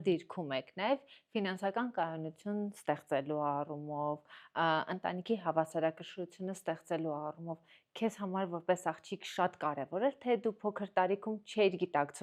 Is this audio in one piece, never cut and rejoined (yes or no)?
yes